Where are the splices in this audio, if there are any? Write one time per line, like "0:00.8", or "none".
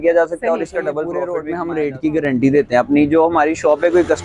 0:01.3